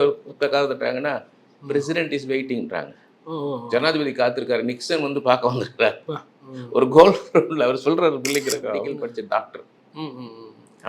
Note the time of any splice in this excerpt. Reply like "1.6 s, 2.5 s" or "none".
8.9 s